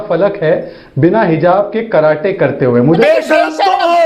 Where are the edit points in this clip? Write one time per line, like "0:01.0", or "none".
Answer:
0:03.0